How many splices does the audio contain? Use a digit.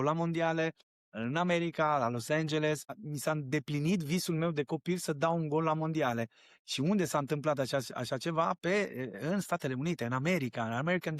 1